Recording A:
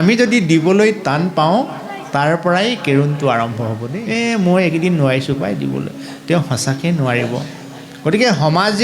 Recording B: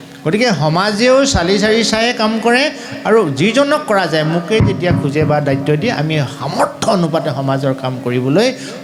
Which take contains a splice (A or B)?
A